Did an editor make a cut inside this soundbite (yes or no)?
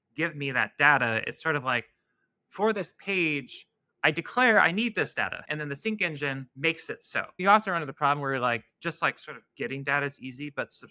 yes